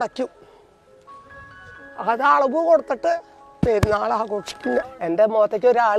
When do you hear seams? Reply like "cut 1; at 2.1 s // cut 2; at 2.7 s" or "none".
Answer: cut 1; at 4.9 s